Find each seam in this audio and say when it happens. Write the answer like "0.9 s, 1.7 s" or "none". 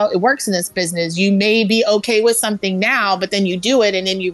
none